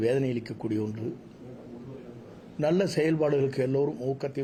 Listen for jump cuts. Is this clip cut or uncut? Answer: uncut